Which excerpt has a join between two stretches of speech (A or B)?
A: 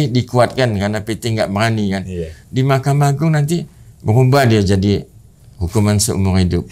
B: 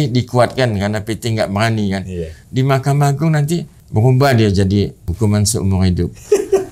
B